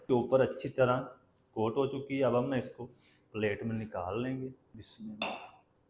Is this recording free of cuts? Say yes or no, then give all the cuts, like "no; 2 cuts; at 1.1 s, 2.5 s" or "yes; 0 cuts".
no; 1 cut; at 4.8 s